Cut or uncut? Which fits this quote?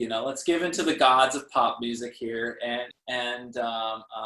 cut